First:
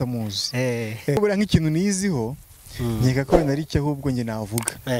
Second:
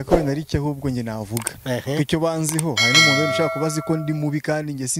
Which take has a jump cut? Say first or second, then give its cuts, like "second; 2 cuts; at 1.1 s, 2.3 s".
first; 1 cut; at 1.2 s